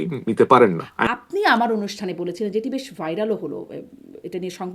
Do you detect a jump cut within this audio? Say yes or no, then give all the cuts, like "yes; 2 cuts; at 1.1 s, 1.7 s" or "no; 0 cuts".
yes; 1 cut; at 1.0 s